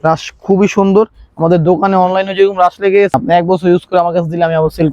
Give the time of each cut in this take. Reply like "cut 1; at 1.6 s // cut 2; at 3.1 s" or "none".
cut 1; at 3.1 s